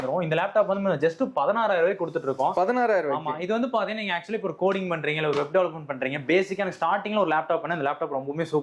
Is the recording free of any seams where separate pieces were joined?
yes; 0 cuts

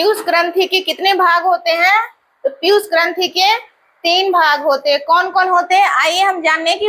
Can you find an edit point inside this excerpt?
no; 0 cuts

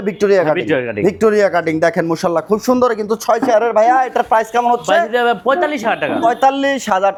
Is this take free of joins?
yes; 0 cuts

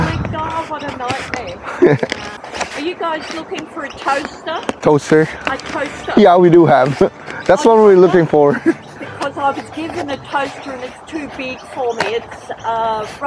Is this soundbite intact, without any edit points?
no; 2 cuts; at 2.4 s, 4.8 s

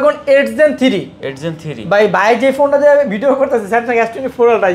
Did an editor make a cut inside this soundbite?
no; 0 cuts

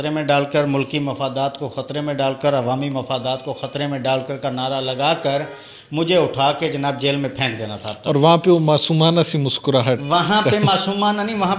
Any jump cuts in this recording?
no; 0 cuts

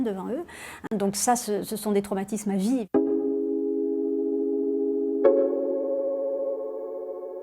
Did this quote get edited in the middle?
yes; 1 cut; at 2.8 s

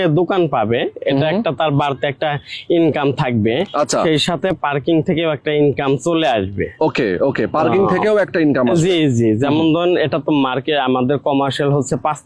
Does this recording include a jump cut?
no; 0 cuts

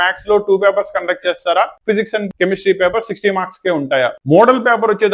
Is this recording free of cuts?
no; 1 cut; at 4.2 s

